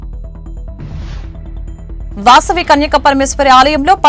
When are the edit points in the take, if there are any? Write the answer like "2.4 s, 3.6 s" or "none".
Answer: none